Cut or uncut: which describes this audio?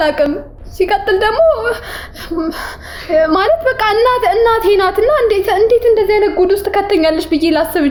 uncut